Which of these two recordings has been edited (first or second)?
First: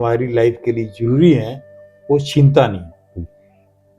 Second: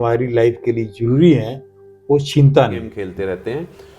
second